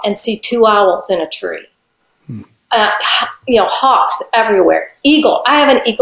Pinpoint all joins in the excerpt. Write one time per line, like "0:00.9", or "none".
none